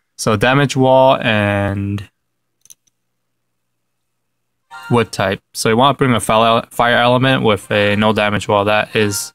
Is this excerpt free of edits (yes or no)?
yes